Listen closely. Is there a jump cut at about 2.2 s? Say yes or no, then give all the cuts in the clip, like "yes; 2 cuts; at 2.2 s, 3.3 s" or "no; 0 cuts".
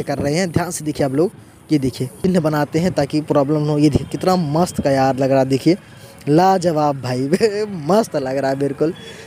yes; 1 cut; at 2.2 s